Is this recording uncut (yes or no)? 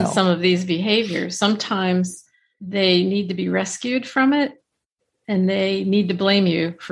yes